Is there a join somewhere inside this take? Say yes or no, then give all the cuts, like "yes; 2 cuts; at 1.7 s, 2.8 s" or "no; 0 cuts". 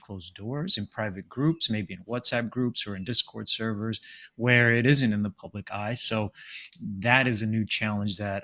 no; 0 cuts